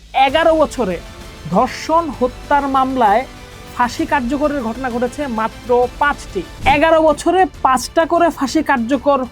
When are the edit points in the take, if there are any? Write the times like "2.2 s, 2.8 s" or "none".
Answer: 6.5 s